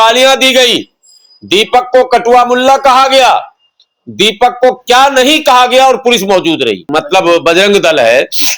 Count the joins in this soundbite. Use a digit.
1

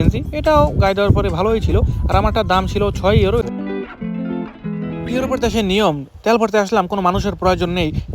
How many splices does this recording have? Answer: 1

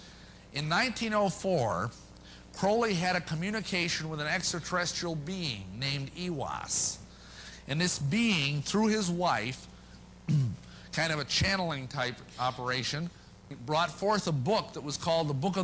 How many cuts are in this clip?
1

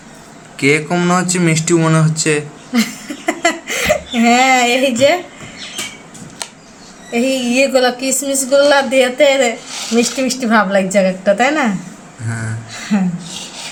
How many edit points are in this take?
0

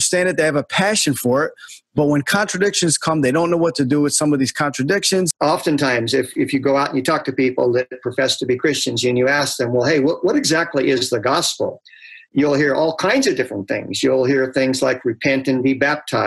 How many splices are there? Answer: 1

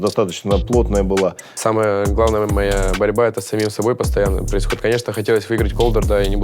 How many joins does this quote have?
1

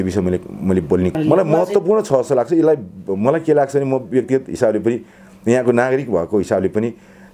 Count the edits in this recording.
1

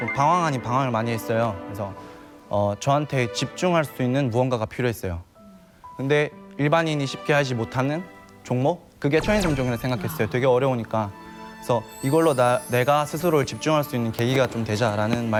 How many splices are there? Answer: 0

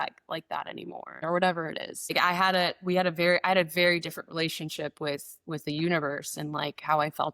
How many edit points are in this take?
2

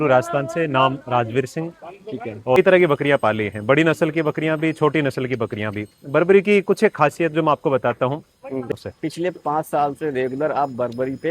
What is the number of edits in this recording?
2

